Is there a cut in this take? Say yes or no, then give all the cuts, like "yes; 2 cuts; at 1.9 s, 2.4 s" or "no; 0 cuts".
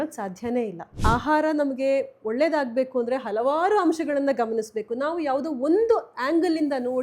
yes; 1 cut; at 0.9 s